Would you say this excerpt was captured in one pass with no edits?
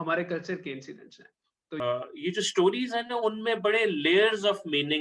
no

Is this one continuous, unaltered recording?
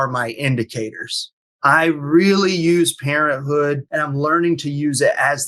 no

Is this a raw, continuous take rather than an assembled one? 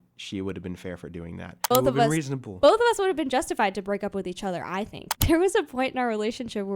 no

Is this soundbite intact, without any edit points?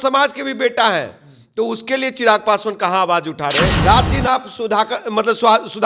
no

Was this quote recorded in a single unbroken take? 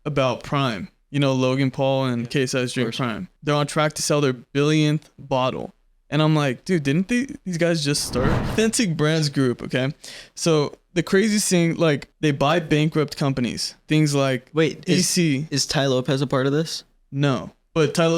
no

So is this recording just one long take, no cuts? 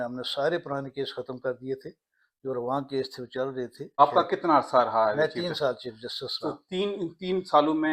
yes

